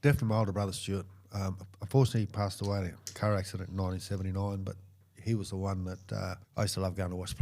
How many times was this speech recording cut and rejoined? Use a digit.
1